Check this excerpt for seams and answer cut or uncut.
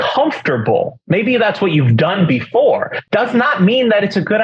cut